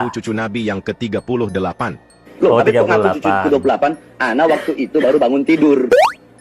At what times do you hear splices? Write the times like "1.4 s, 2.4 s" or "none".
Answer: none